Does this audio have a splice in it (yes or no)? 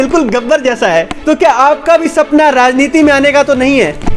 yes